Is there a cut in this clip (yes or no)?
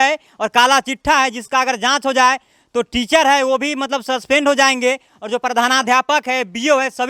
no